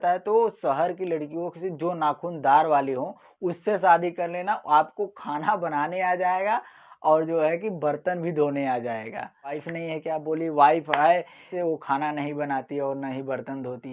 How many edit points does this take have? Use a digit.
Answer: 2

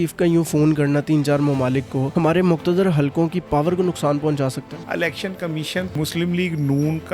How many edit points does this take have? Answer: 3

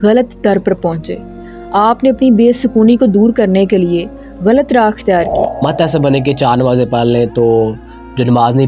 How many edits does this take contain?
1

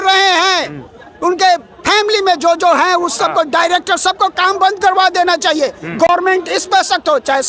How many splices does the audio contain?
0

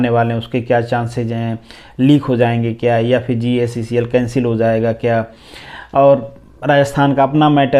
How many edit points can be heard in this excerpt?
0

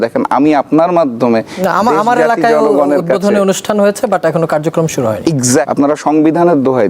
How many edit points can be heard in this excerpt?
1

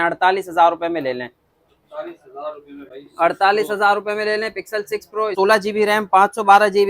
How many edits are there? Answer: 1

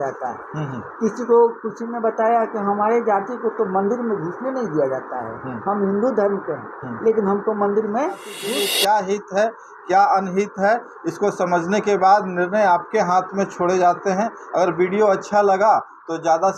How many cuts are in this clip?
1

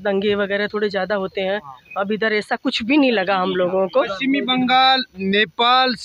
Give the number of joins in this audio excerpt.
1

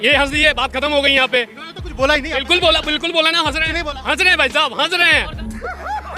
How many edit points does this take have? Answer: 0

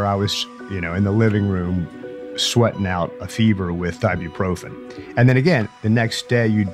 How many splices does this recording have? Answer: 0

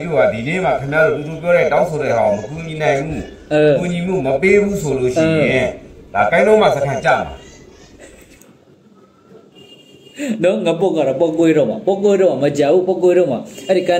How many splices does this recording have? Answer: 0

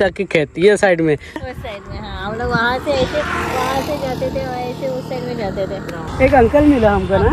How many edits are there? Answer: 2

